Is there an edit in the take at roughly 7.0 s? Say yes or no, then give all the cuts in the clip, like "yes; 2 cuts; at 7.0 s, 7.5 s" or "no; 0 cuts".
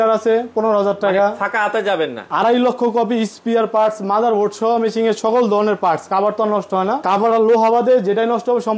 yes; 2 cuts; at 2.2 s, 7.0 s